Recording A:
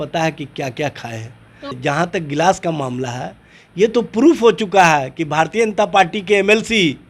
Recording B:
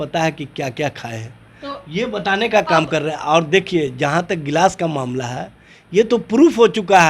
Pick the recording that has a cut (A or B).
A